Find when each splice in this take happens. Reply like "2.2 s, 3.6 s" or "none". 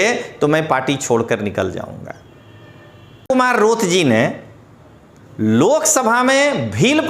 3.3 s

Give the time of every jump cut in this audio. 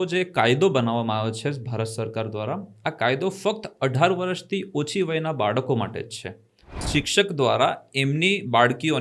6.8 s

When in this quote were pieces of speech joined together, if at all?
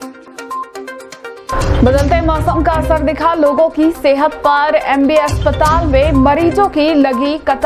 1.5 s

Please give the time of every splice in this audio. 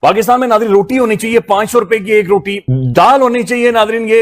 2.7 s

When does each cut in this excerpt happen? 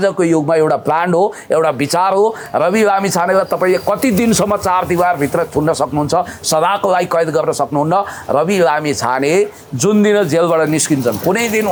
none

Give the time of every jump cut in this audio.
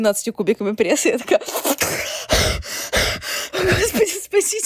3.4 s

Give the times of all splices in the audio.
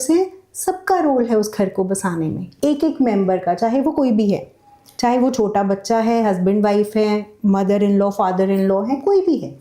none

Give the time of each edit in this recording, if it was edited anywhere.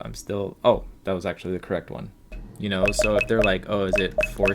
2.4 s

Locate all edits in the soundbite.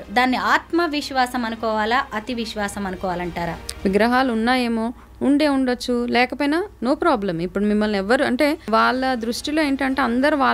3.6 s, 8.7 s

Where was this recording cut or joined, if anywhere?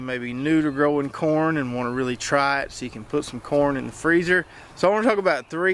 4.6 s

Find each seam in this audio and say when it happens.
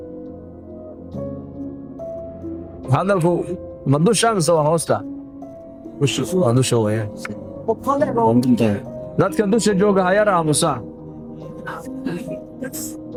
none

